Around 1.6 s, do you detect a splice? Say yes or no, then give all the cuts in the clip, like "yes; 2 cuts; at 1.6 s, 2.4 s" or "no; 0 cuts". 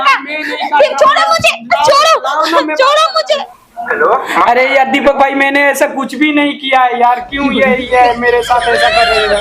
no; 1 cut; at 3.6 s